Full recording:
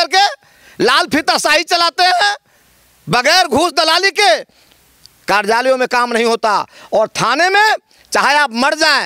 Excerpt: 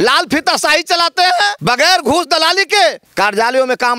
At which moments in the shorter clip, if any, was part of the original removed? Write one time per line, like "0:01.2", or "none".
0:01.6
0:03.0